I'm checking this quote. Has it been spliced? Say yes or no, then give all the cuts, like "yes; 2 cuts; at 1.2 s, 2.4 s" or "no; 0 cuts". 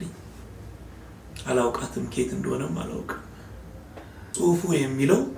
yes; 1 cut; at 4.2 s